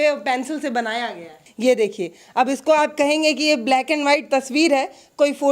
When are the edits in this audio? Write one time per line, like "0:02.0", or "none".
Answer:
0:01.4